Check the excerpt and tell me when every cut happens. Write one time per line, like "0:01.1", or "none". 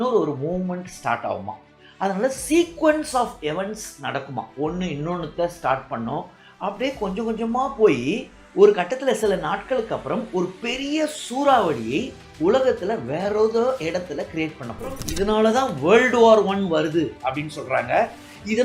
0:15.1